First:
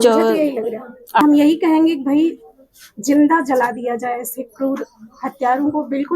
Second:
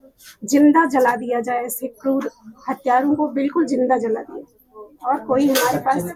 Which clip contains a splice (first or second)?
first